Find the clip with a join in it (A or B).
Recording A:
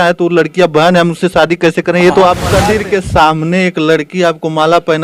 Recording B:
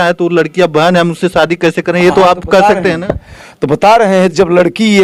A